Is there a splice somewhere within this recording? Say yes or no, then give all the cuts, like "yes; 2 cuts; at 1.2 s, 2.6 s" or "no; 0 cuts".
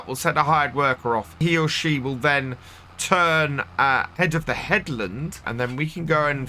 yes; 3 cuts; at 1.4 s, 4.1 s, 5.5 s